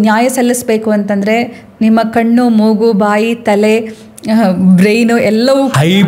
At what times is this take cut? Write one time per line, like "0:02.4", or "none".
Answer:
none